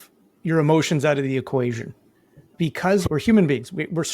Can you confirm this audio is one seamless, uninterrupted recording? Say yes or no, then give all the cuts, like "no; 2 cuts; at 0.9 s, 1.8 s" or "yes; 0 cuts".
no; 1 cut; at 3.1 s